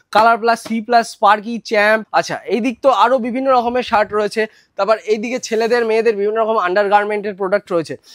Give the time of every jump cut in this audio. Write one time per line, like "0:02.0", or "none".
0:02.1

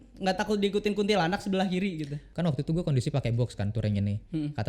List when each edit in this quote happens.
0:02.2

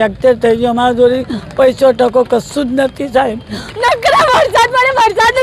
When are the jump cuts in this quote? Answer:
0:03.6

